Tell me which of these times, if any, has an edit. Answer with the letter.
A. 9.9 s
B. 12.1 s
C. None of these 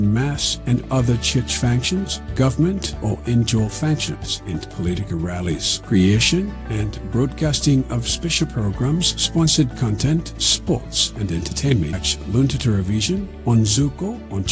B